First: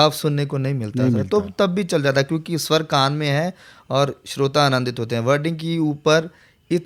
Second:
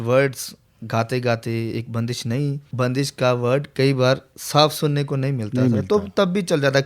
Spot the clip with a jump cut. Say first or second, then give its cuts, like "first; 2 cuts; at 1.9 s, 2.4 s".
second; 2 cuts; at 2.6 s, 3.7 s